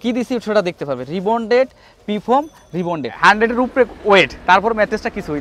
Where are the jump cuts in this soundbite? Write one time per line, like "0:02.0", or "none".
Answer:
0:03.1